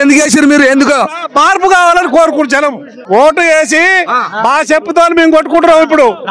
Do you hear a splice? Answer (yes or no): yes